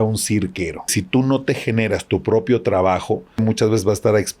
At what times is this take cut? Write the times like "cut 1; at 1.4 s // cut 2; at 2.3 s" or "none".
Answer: cut 1; at 0.9 s // cut 2; at 3.4 s